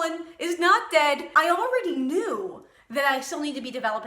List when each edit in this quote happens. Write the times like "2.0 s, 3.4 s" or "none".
1.2 s